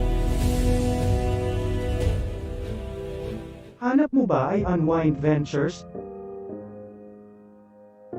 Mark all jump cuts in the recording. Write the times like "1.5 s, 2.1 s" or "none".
3.8 s